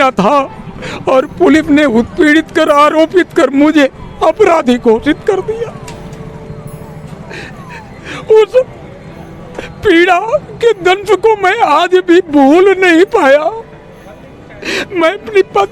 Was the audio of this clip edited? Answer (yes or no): no